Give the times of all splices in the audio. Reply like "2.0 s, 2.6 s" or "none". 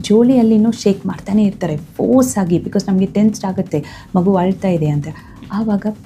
none